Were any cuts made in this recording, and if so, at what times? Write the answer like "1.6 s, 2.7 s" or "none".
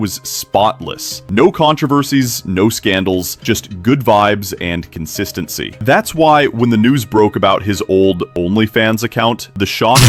none